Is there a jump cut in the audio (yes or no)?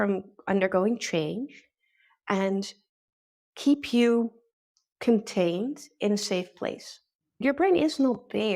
yes